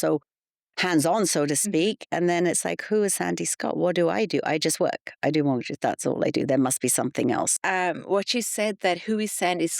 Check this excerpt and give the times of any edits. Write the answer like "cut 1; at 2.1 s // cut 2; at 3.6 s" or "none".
cut 1; at 7.5 s